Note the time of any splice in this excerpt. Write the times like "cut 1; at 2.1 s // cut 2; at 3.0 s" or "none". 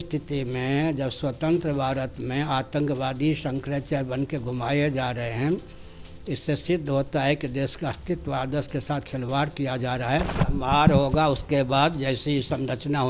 cut 1; at 10.4 s